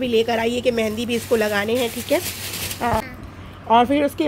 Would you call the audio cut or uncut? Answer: cut